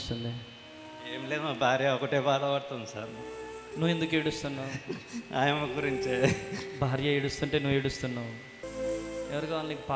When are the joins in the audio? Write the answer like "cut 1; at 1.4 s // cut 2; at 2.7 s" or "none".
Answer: cut 1; at 8.7 s